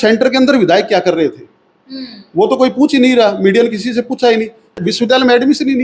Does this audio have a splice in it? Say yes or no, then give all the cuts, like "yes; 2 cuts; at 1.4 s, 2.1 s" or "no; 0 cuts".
yes; 1 cut; at 4.7 s